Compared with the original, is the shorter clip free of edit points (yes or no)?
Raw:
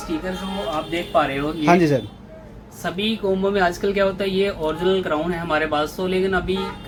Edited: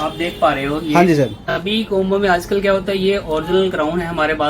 no